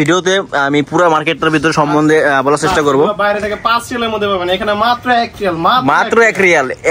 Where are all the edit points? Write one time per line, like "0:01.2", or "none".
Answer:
none

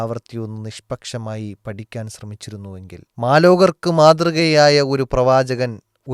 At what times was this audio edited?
0:03.0

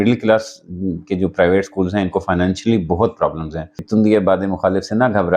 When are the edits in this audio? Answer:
0:03.9

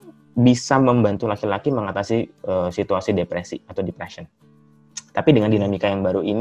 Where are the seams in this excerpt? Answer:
none

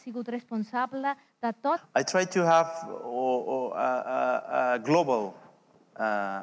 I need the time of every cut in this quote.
none

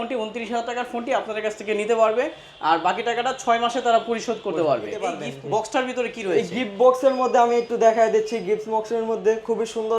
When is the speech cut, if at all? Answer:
0:05.3

